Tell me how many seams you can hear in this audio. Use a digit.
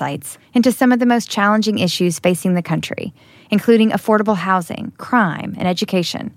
0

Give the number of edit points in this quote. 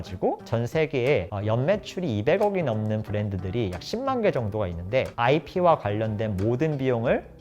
1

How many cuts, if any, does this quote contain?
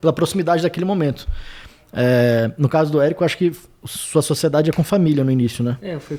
0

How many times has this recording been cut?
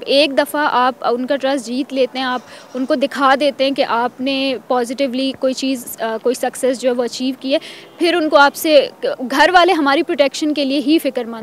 0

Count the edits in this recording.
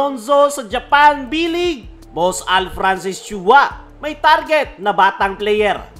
1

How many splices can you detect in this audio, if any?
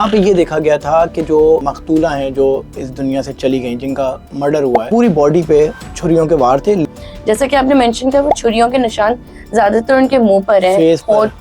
3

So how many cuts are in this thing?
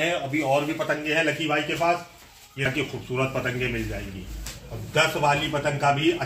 1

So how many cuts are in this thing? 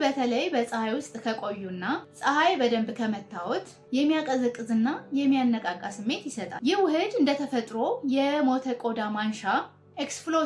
1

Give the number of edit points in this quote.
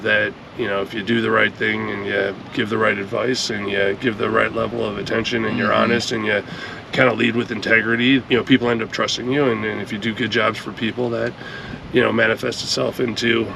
1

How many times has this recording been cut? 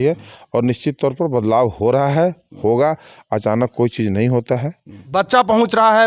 1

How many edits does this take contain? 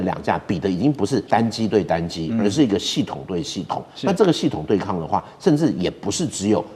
1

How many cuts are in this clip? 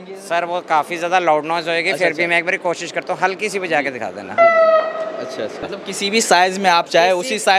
1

